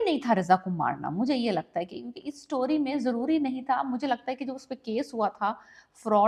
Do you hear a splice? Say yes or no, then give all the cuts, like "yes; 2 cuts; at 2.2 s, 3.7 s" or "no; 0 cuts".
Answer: no; 0 cuts